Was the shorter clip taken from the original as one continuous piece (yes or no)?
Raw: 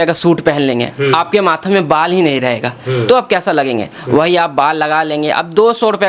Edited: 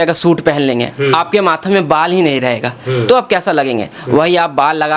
yes